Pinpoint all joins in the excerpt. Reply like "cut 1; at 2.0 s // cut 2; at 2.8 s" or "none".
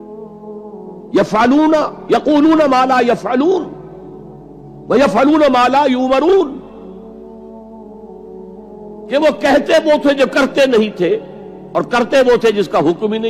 cut 1; at 6.6 s // cut 2; at 9.0 s